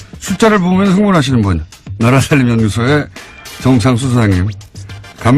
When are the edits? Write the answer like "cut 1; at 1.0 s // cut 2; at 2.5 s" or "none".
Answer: none

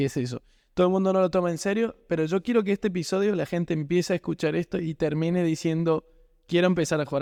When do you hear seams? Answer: none

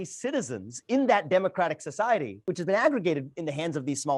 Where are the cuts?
cut 1; at 2.4 s

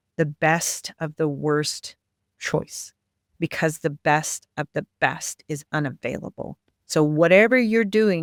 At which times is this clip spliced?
none

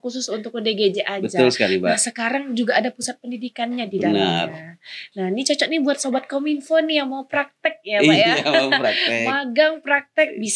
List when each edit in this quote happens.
none

